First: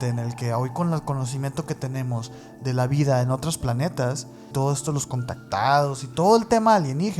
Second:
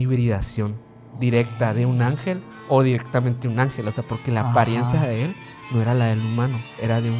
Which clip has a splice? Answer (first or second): first